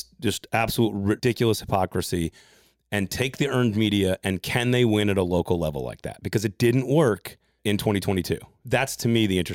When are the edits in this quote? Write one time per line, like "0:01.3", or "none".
0:01.2
0:07.6
0:08.6